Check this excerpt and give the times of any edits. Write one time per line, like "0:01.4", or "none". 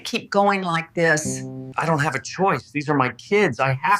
0:01.6